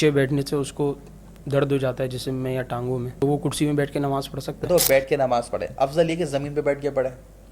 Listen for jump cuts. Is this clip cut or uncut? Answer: cut